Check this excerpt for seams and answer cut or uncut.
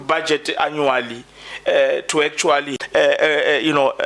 cut